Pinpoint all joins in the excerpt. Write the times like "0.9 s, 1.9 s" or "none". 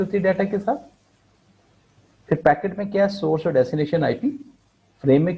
none